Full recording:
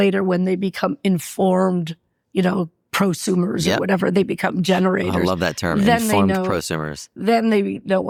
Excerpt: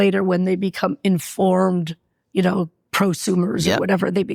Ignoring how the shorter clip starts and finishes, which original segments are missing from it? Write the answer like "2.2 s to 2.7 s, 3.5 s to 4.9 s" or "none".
none